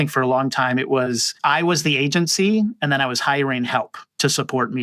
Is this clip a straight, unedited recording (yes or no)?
no